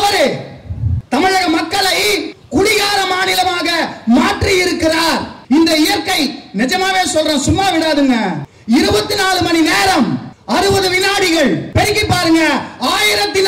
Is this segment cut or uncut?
cut